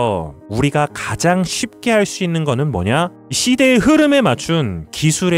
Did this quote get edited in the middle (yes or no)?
no